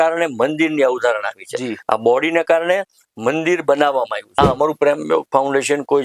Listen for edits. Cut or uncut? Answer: cut